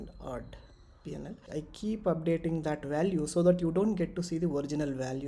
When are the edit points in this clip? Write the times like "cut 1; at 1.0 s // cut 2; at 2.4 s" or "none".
cut 1; at 1.4 s